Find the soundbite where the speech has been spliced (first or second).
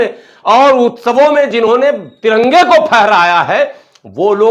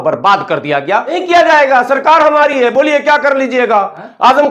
second